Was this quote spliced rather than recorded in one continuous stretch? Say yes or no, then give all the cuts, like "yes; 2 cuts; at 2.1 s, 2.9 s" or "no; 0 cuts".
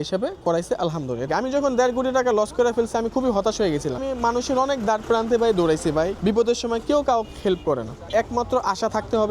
yes; 4 cuts; at 1.3 s, 4.0 s, 6.2 s, 8.1 s